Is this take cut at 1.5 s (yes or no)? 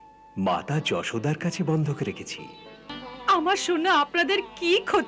no